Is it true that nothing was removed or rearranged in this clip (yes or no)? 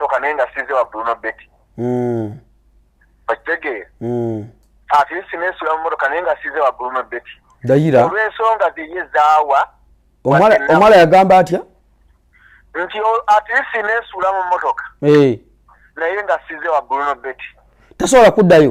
yes